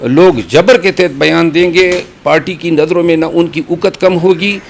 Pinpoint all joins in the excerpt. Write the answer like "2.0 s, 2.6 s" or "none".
none